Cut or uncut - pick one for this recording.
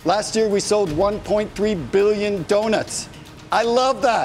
uncut